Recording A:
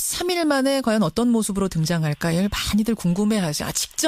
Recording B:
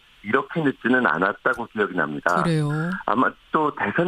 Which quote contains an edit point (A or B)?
B